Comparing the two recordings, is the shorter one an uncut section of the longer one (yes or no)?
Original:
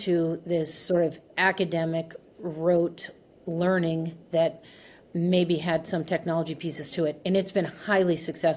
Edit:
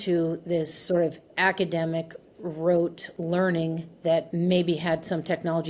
no